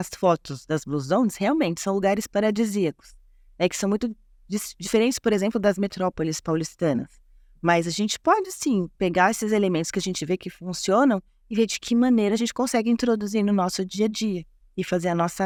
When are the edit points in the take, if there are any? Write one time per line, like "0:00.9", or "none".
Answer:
none